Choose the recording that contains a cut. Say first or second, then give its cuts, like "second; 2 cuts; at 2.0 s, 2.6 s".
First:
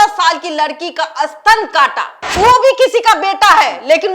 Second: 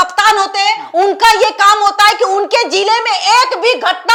first; 1 cut; at 2.3 s